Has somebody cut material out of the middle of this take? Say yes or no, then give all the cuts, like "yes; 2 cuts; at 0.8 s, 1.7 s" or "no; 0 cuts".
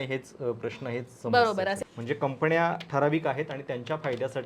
yes; 1 cut; at 1.8 s